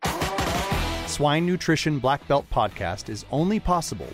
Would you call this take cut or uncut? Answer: cut